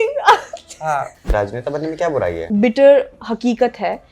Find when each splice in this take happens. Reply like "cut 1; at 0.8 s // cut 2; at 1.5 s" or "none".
cut 1; at 1.3 s // cut 2; at 2.4 s